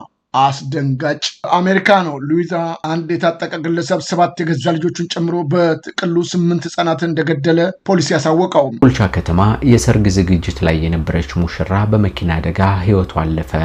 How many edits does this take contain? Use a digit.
1